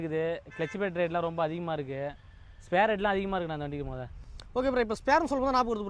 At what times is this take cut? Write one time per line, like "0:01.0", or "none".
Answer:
none